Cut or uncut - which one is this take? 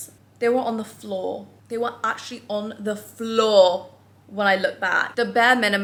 uncut